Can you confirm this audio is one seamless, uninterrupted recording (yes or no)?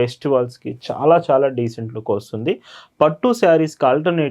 yes